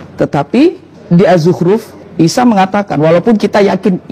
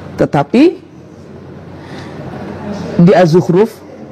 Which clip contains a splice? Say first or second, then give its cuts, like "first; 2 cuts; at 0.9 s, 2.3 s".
first; 2 cuts; at 0.9 s, 2.0 s